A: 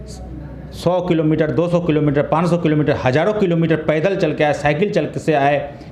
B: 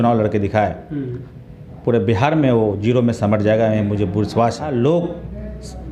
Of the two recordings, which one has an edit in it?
B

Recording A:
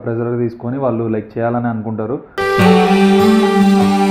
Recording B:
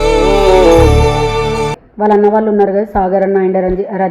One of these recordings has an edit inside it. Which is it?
B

